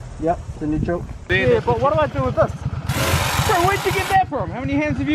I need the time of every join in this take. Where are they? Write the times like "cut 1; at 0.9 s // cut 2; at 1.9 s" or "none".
none